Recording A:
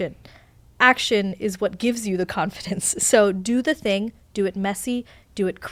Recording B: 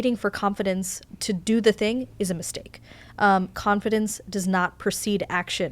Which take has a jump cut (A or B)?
B